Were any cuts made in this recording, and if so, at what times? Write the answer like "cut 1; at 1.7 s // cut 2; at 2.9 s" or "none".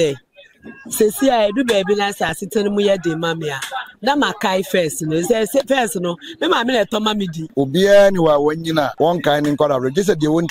cut 1; at 7.4 s // cut 2; at 8.9 s